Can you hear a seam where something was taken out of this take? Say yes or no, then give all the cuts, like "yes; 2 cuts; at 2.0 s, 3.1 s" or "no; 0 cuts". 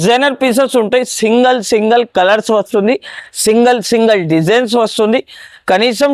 no; 0 cuts